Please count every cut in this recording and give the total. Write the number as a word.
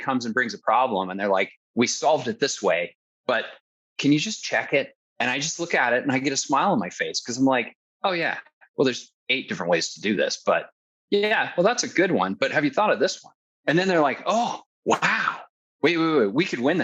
six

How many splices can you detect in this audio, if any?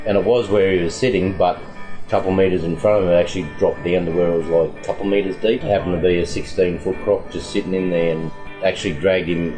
two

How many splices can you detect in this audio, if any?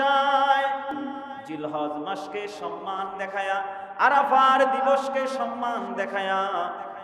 one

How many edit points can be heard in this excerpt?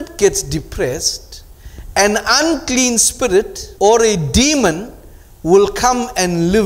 one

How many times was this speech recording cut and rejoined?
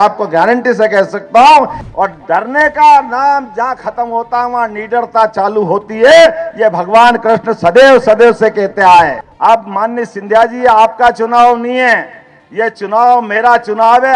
two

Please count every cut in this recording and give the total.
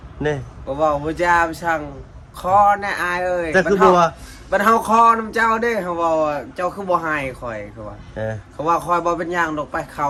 zero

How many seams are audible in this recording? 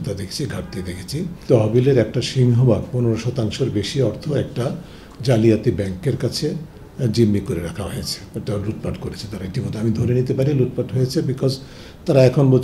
one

